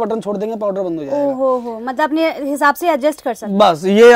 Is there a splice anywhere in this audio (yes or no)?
no